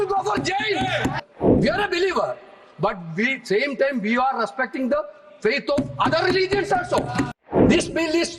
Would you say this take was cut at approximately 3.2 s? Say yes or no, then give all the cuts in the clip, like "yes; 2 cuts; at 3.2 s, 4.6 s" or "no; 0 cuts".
no; 2 cuts; at 1.2 s, 7.4 s